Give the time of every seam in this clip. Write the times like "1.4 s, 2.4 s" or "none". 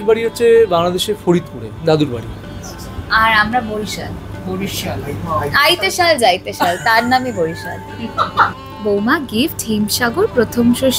8.5 s